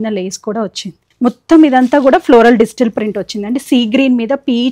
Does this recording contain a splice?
yes; 1 cut; at 1.0 s

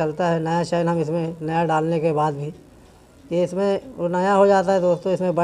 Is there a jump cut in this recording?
no; 0 cuts

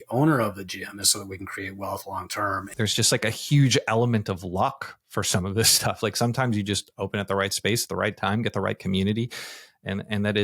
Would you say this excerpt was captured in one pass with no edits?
no; 1 cut; at 2.7 s

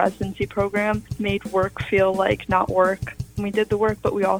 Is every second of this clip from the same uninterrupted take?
no; 1 cut; at 3.3 s

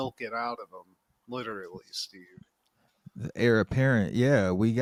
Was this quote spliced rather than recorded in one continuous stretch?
no; 0 cuts

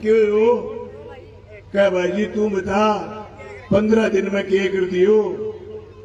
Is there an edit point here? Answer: no; 0 cuts

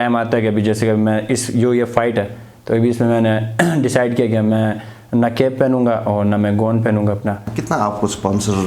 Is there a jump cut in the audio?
yes; 1 cut; at 7.5 s

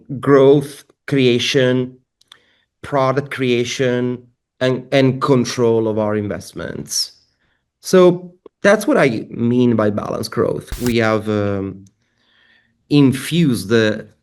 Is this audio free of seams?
no; 1 cut; at 10.7 s

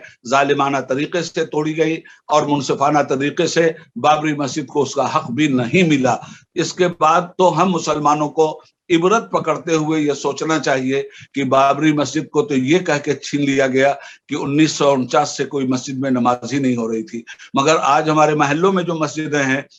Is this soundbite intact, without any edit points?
yes; 0 cuts

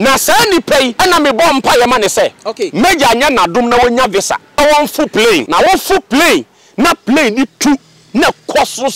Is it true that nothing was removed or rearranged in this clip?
no; 3 cuts; at 0.9 s, 4.6 s, 5.5 s

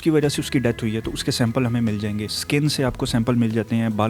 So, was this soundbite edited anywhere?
yes; 1 cut; at 2.3 s

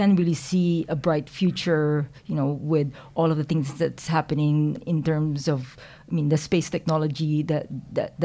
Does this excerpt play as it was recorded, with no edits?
no; 1 cut; at 4.8 s

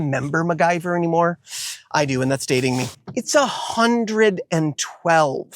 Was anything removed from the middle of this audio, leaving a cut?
yes; 1 cut; at 3.0 s

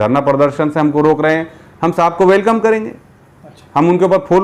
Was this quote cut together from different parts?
no; 0 cuts

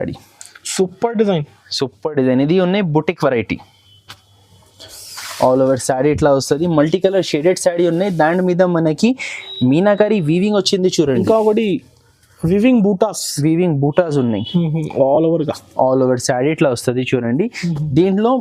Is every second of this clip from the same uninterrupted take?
yes; 0 cuts

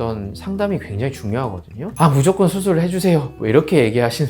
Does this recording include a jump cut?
yes; 1 cut; at 1.9 s

